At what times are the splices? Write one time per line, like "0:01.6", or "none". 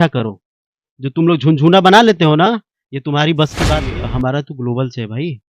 0:03.9